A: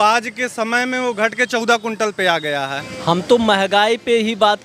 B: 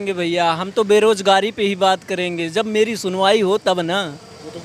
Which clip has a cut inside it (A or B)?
A